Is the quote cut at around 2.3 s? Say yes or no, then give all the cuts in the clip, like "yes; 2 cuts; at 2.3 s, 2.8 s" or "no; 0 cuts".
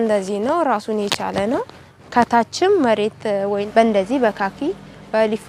no; 1 cut; at 3.7 s